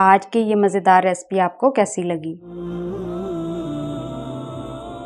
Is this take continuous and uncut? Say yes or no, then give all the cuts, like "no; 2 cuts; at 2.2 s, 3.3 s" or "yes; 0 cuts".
no; 2 cuts; at 2.6 s, 4.0 s